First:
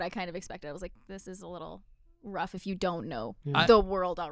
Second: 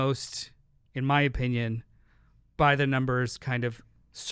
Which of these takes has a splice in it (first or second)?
first